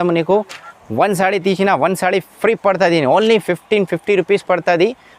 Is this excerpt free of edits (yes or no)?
yes